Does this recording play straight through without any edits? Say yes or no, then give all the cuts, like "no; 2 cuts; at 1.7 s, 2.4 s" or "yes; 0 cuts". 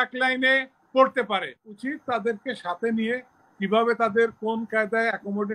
no; 1 cut; at 1.7 s